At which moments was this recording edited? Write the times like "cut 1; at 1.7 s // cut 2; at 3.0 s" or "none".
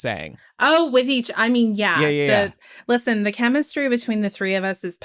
none